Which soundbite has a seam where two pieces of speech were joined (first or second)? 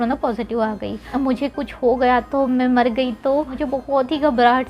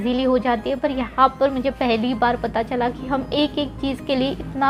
first